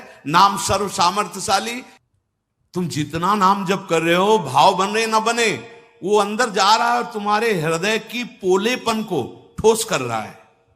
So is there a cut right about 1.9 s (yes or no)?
yes